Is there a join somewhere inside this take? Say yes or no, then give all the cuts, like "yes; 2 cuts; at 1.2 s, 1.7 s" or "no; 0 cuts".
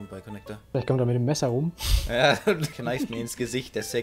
no; 0 cuts